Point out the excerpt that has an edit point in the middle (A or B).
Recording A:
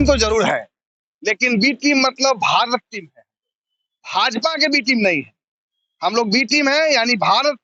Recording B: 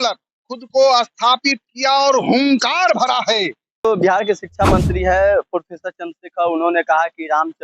B